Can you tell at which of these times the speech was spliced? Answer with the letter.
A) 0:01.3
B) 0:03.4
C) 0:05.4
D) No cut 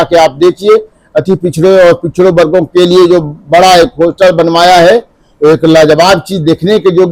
D